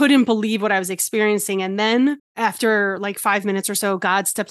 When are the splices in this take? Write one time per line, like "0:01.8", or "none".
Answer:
0:02.3